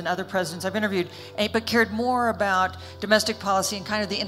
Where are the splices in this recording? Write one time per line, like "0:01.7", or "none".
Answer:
none